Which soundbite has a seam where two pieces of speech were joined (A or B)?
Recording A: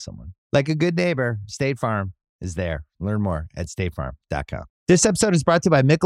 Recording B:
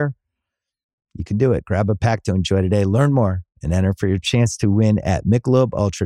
A